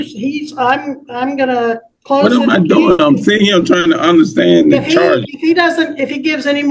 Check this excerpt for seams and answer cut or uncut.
uncut